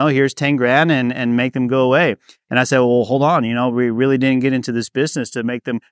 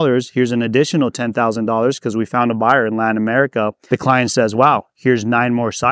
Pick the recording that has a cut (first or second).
second